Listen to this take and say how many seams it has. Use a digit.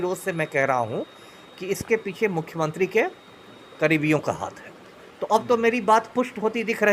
0